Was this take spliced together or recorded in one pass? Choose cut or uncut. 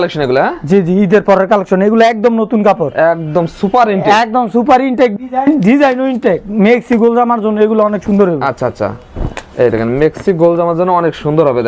uncut